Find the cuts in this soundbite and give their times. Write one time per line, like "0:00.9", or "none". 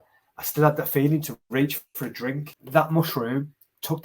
0:02.5